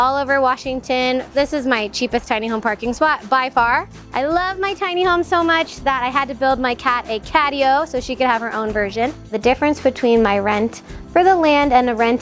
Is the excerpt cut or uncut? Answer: cut